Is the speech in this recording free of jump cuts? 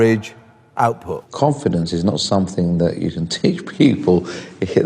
no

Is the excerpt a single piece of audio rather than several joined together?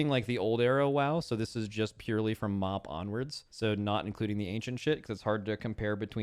yes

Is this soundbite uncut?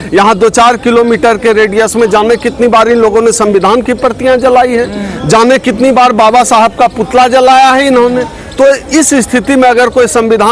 yes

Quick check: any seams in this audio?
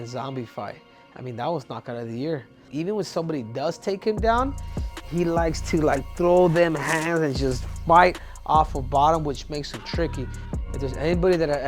yes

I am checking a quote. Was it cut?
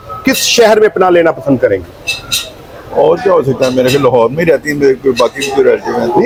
no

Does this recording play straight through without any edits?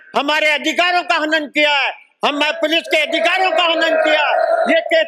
yes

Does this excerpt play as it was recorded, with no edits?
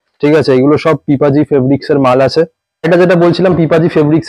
no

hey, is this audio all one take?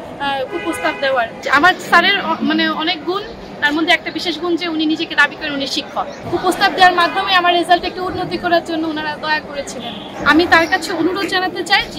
no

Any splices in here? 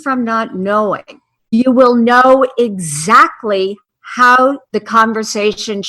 yes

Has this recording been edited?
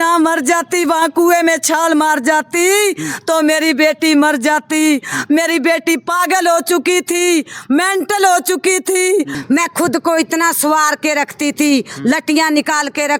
yes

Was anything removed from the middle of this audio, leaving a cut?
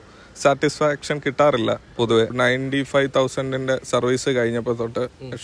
yes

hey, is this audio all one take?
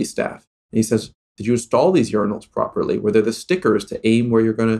yes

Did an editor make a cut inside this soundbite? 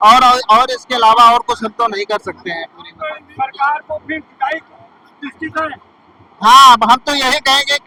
no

